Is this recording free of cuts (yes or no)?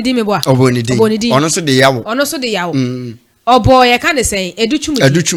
yes